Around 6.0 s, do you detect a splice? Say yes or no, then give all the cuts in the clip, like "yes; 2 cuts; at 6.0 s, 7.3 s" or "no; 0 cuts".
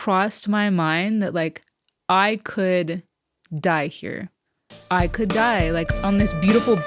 yes; 1 cut; at 6.0 s